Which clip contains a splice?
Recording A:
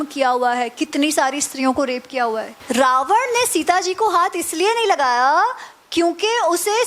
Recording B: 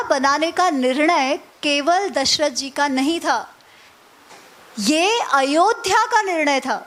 A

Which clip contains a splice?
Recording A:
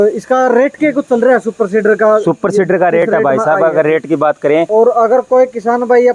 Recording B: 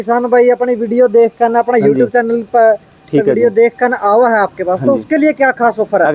A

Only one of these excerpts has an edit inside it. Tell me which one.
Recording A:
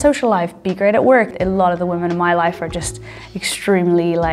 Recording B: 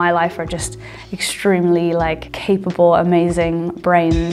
A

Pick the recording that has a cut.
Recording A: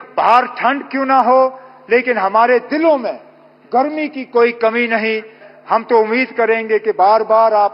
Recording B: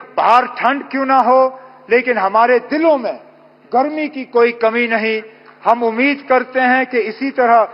A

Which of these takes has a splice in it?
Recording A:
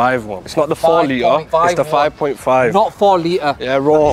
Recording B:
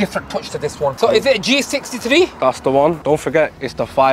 B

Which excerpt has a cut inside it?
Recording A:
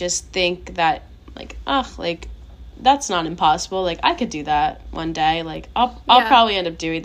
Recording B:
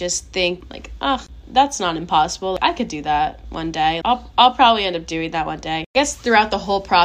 B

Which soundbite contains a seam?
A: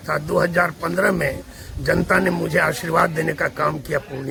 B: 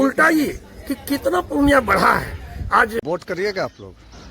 B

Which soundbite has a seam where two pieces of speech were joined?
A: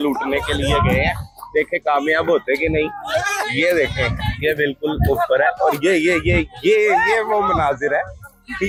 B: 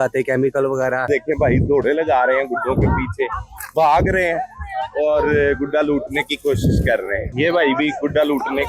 B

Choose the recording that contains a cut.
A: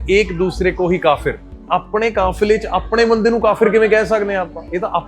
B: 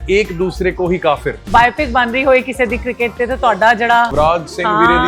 B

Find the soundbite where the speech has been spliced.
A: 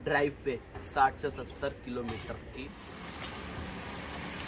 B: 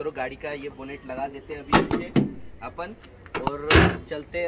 A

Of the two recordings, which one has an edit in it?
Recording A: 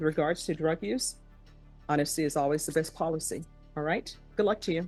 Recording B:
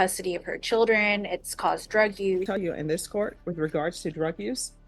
B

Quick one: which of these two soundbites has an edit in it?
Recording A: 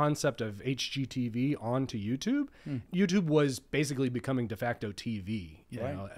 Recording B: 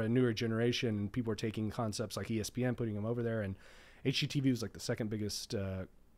A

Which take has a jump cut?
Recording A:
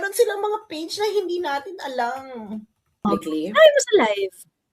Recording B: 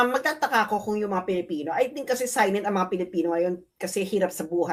A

